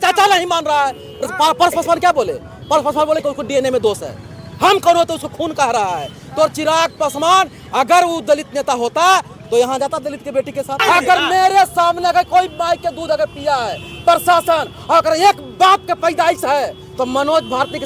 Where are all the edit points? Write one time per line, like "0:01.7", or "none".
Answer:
0:10.8